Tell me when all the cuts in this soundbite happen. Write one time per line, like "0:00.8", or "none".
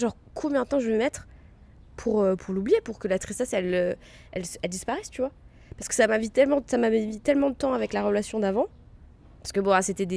none